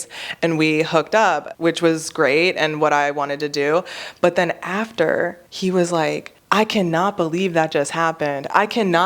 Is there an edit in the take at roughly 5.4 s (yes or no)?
yes